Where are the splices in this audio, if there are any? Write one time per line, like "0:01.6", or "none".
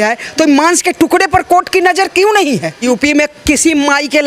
0:02.7